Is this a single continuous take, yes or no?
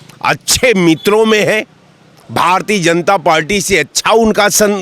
yes